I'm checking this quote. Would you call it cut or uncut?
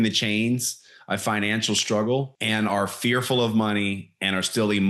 cut